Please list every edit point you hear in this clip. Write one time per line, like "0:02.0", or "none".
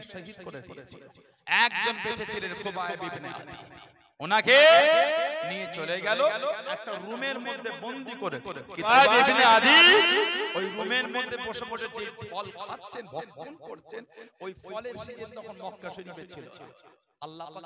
0:08.9